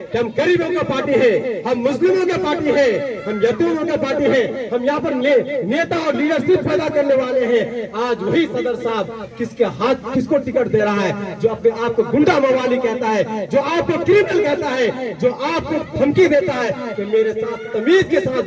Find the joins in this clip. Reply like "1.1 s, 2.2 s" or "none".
none